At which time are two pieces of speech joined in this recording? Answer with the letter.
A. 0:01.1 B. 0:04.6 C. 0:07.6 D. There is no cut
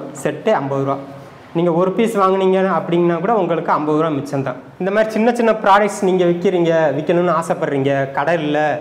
B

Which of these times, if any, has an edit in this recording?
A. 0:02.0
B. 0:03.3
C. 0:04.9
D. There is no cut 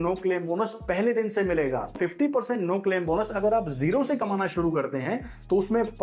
A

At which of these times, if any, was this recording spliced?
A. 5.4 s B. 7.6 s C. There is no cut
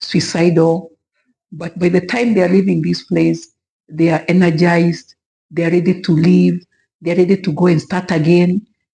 C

